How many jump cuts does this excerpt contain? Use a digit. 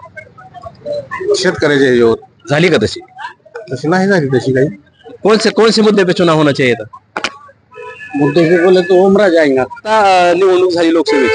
2